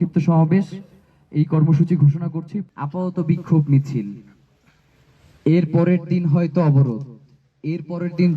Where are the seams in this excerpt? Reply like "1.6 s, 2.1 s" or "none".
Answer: 2.6 s